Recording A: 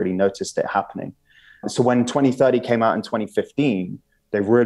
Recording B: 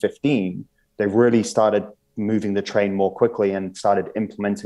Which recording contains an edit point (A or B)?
A